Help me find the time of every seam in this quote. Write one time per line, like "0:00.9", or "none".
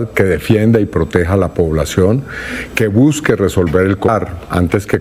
0:04.1